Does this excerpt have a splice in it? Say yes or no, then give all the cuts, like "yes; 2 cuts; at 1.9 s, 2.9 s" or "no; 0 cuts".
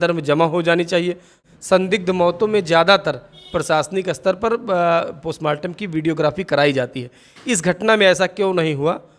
yes; 1 cut; at 1.4 s